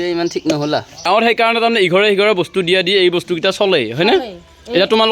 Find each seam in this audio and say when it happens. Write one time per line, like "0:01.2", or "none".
0:01.0